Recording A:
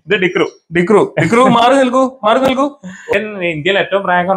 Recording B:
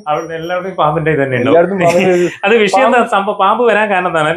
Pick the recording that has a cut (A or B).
A